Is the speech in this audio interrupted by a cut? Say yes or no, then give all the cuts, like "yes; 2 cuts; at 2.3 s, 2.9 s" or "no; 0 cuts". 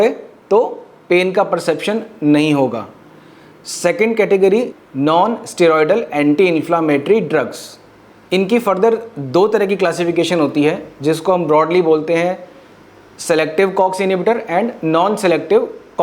no; 0 cuts